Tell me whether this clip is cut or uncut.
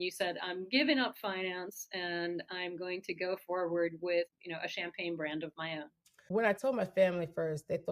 cut